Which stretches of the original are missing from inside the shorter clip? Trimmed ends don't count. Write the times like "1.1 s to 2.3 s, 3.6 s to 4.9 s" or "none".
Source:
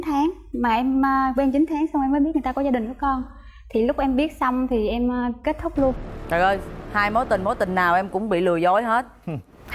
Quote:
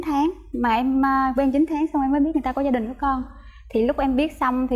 none